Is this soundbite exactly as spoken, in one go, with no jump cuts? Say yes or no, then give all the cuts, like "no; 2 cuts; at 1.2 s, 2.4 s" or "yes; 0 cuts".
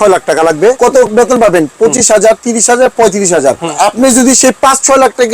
no; 2 cuts; at 0.8 s, 3.7 s